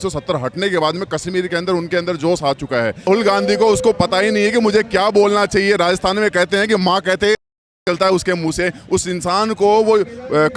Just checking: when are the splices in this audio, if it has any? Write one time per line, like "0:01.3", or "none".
0:03.1

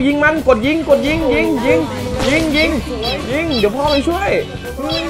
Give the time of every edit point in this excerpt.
none

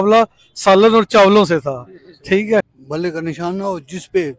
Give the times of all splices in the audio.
0:02.8

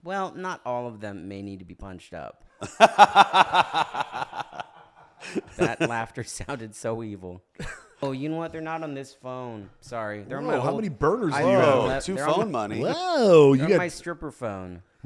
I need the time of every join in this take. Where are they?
0:08.0

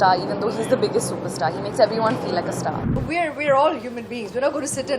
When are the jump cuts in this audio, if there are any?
0:02.9

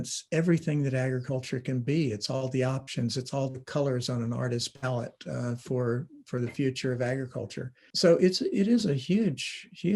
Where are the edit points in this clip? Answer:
0:07.8

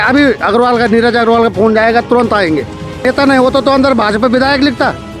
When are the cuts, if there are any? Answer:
0:03.0

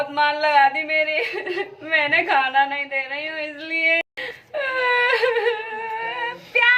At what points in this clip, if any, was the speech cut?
none

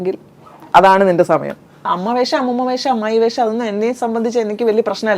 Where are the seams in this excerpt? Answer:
0:01.8

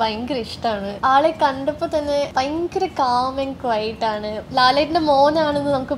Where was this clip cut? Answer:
0:00.9
0:02.3
0:04.4

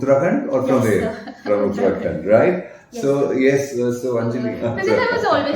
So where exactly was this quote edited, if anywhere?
0:04.5

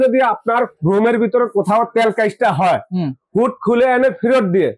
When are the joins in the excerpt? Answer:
none

